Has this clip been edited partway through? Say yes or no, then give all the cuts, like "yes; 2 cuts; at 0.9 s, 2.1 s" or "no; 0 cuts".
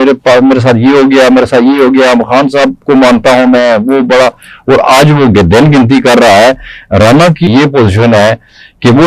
yes; 1 cut; at 7.5 s